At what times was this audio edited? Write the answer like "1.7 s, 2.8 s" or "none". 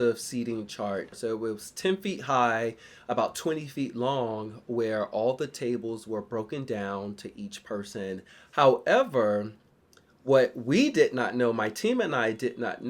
1.1 s, 8.3 s